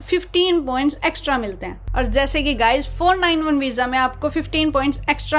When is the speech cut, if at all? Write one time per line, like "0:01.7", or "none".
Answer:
none